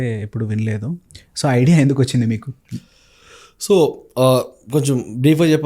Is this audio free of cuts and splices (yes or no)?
yes